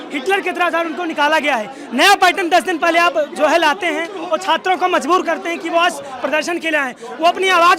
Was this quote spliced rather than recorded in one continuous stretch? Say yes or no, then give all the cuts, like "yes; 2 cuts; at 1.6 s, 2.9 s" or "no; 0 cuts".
no; 0 cuts